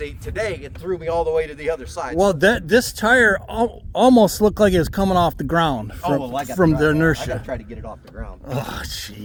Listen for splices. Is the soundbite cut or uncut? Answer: uncut